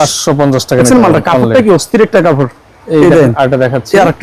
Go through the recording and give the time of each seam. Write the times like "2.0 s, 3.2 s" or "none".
none